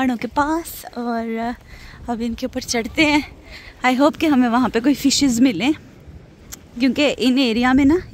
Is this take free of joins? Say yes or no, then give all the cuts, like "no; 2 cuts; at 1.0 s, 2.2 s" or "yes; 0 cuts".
yes; 0 cuts